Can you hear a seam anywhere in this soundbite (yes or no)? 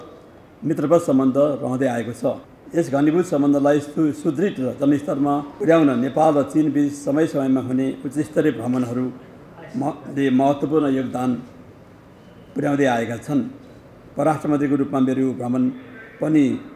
yes